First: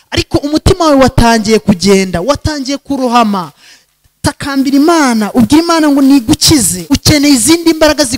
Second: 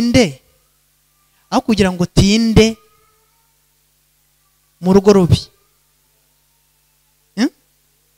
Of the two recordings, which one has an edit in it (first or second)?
first